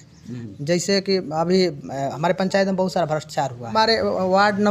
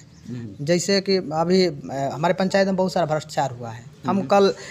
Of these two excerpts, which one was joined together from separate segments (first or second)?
first